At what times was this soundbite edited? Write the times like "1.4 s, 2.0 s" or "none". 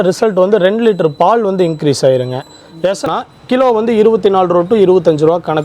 3.1 s